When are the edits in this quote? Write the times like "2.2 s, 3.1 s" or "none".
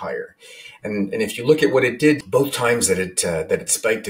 2.2 s